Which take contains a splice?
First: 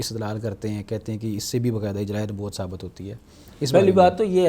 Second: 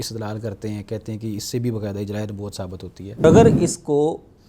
second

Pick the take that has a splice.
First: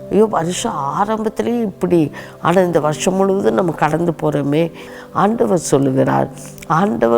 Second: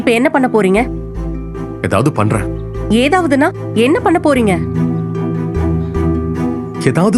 first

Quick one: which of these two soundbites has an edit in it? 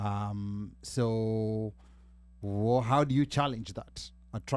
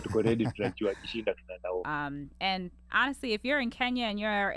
second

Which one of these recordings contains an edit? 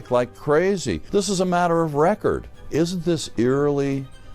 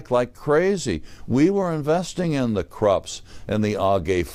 first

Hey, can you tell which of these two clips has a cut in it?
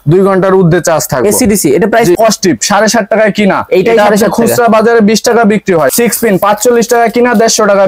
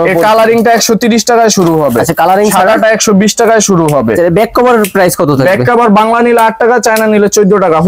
first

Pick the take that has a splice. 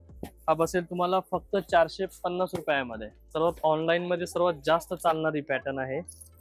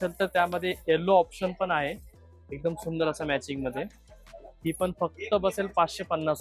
first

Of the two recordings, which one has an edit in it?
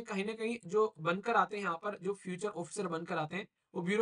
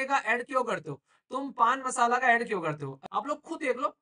second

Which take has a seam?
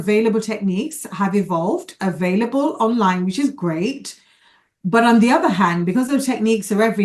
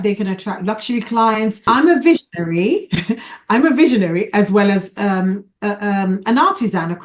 second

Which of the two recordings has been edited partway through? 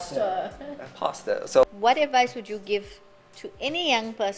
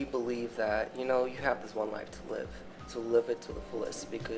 first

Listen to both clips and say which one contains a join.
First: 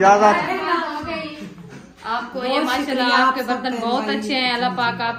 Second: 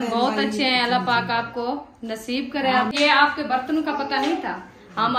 second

